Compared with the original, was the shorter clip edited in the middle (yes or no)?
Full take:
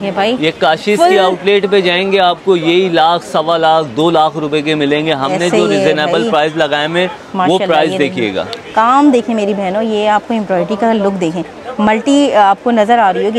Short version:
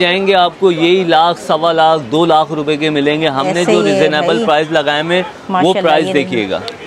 no